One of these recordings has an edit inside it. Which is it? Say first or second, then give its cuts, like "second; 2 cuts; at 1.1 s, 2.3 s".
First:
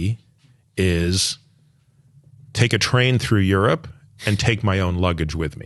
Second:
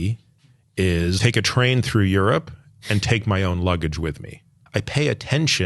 second; 2 cuts; at 1.2 s, 4.9 s